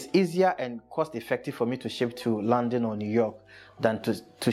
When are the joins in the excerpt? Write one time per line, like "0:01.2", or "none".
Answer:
none